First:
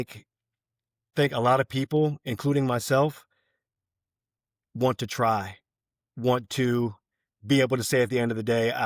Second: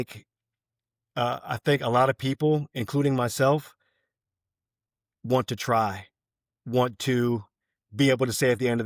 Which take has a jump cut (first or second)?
first